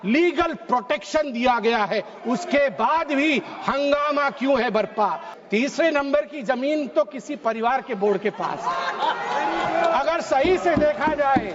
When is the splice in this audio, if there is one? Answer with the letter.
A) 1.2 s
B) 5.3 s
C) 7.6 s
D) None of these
B